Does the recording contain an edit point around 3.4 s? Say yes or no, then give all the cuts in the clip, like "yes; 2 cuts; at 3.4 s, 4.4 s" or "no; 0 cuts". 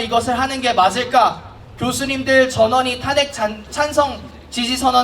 no; 0 cuts